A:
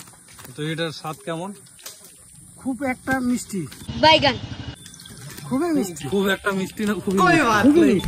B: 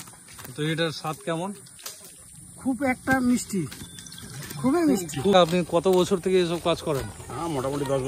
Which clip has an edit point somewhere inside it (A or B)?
B